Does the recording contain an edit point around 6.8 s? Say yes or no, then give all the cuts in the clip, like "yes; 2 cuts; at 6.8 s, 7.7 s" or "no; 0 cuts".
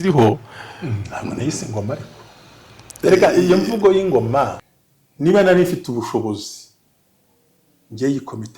no; 1 cut; at 4.7 s